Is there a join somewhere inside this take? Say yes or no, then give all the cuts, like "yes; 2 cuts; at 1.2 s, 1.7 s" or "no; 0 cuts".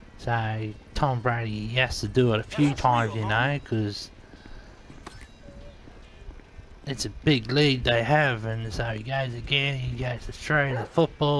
yes; 1 cut; at 7.8 s